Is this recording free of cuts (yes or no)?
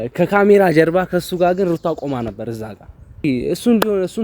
no